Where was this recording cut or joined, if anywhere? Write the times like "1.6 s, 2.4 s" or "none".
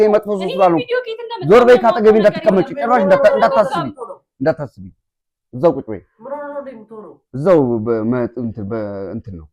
none